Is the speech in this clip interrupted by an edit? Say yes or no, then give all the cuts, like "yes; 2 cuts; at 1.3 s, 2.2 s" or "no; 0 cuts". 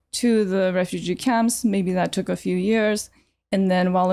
no; 0 cuts